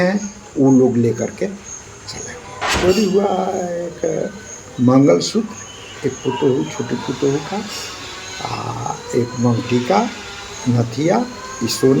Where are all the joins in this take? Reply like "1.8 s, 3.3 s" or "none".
2.7 s

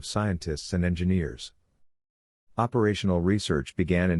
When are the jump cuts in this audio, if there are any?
none

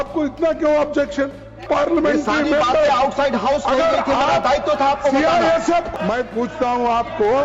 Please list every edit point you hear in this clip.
1.6 s, 5.9 s

